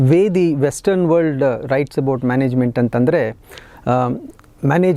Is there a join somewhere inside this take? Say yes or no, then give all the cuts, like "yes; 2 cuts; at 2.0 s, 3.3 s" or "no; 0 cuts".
no; 0 cuts